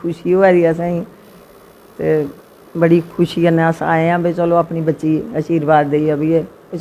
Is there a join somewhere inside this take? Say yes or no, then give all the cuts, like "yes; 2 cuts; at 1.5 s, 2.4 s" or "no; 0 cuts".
no; 0 cuts